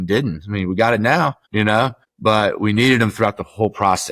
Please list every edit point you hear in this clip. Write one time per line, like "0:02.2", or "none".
none

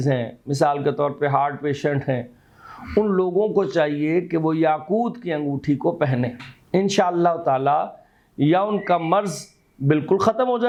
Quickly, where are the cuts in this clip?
none

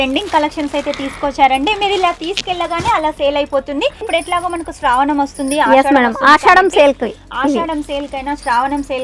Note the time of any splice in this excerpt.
0:04.0

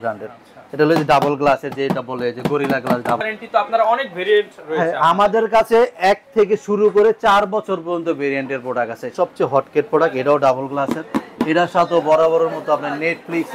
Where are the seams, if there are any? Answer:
0:03.2
0:09.1

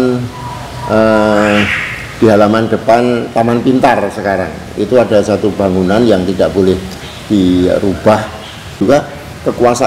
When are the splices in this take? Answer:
0:08.8

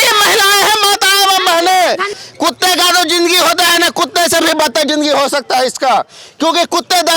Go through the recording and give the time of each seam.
0:02.1

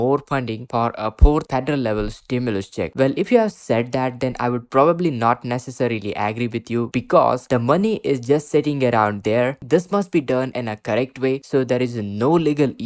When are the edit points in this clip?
0:07.4
0:09.6

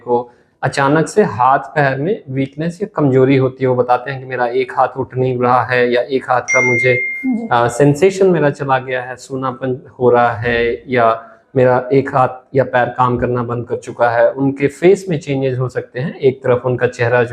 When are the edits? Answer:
none

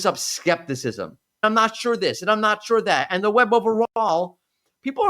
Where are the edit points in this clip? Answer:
0:01.4

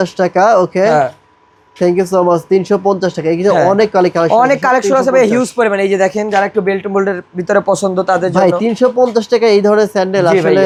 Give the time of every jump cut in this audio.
none

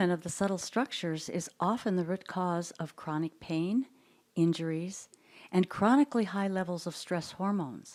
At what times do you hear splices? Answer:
none

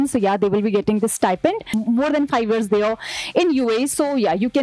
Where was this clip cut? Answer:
0:01.7

